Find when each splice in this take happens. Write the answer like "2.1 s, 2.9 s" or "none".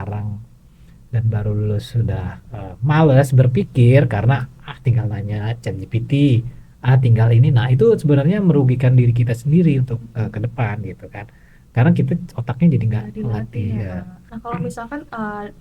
none

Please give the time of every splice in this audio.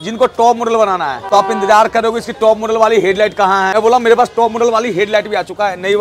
1.2 s, 3.7 s

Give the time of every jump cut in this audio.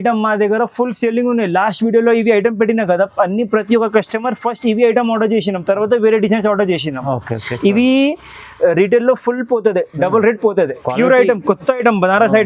10.8 s

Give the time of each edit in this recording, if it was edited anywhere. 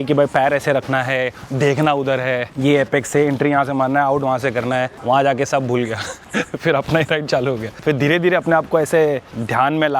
none

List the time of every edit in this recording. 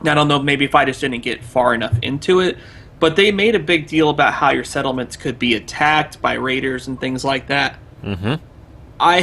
7.8 s

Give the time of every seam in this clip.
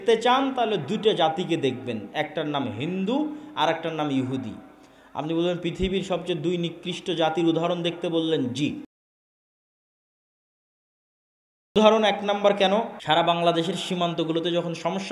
13.0 s

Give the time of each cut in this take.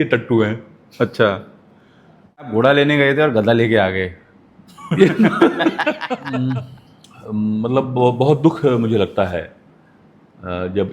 2.5 s, 6.1 s

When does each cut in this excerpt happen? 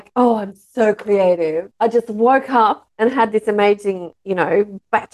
none

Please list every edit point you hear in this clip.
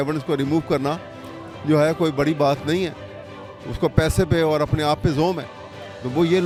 none

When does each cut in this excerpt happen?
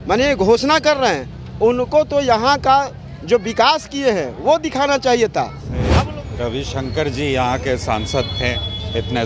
6.0 s

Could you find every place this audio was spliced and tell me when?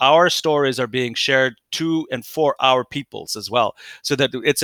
none

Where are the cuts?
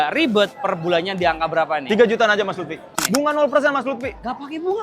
2.9 s

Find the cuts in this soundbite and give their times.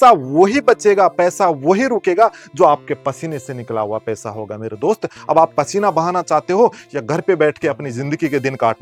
none

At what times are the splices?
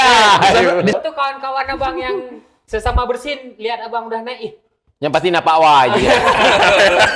0.9 s

